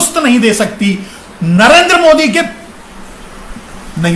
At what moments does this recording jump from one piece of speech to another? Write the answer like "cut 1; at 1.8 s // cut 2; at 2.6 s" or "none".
none

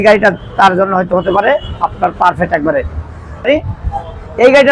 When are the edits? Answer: cut 1; at 3.5 s

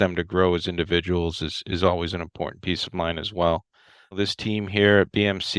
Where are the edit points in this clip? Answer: cut 1; at 4.1 s

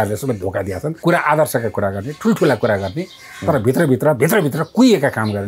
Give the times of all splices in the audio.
cut 1; at 0.9 s

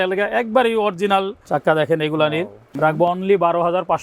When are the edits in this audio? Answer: cut 1; at 1.4 s // cut 2; at 2.6 s

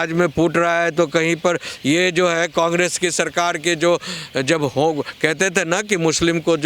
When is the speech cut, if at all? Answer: none

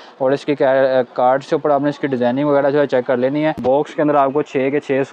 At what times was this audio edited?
cut 1; at 3.6 s

